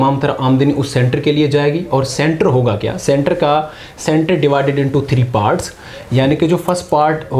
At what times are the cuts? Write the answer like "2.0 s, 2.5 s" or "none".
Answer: none